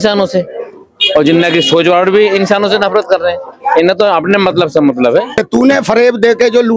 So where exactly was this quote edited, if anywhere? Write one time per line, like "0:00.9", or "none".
0:05.4